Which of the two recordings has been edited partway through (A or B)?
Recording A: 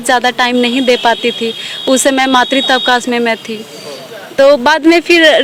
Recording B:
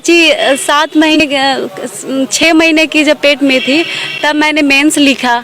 B